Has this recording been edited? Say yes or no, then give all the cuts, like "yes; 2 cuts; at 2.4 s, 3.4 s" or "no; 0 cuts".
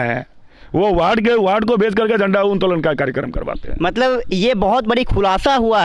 no; 0 cuts